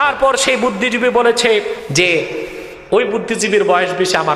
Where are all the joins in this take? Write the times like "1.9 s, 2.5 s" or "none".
1.8 s